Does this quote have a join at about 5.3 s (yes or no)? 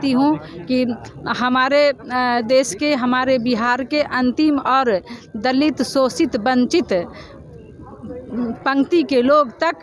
no